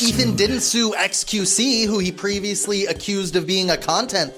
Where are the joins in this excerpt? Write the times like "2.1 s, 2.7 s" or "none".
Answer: none